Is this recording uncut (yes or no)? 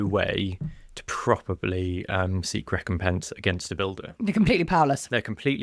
yes